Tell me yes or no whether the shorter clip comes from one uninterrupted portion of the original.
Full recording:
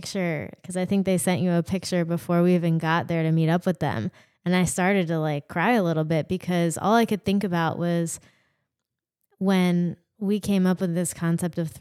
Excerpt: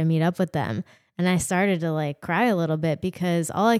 yes